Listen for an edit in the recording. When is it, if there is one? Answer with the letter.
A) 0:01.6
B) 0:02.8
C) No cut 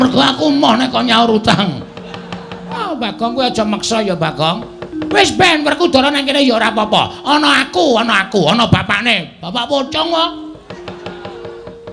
B